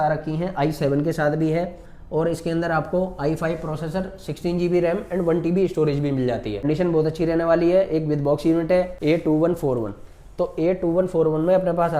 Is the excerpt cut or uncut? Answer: cut